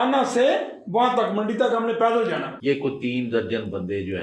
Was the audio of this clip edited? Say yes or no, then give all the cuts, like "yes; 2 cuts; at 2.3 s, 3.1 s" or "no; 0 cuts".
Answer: yes; 1 cut; at 2.5 s